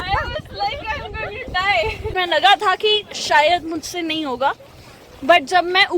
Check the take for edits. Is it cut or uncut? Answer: cut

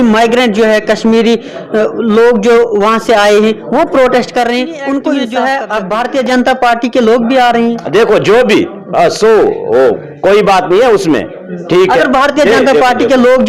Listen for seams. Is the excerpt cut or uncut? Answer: cut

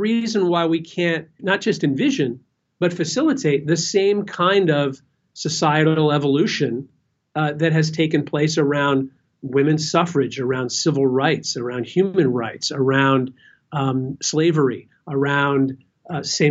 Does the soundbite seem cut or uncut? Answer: cut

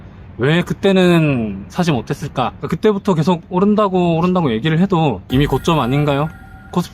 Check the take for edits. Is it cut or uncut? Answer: cut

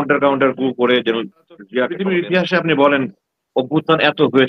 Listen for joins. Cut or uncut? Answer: cut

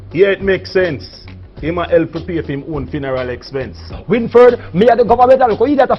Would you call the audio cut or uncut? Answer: cut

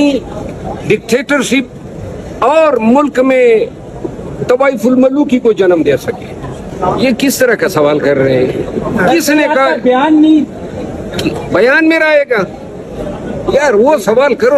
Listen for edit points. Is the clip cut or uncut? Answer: cut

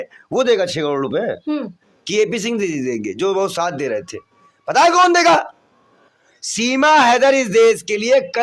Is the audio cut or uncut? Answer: uncut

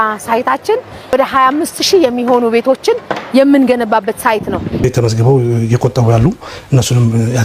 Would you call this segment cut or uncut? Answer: cut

